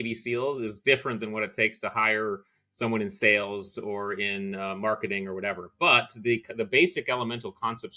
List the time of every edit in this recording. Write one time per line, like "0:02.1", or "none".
none